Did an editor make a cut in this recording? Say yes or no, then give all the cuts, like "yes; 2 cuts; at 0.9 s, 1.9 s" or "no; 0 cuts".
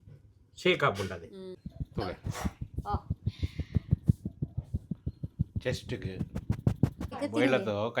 yes; 2 cuts; at 1.6 s, 7.2 s